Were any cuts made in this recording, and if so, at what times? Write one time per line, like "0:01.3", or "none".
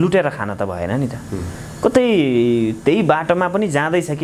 none